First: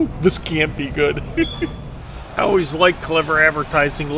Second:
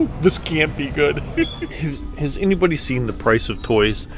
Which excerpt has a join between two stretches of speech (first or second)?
first